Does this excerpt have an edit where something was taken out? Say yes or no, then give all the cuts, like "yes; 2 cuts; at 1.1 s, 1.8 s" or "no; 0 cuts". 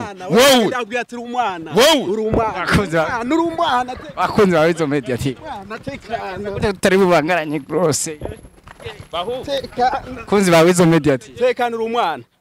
no; 0 cuts